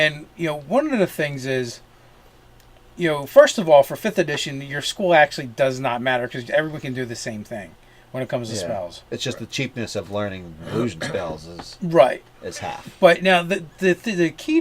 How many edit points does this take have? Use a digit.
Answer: 1